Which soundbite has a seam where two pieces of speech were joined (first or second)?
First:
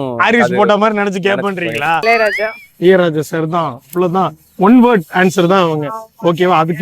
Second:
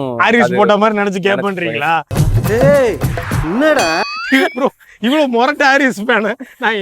first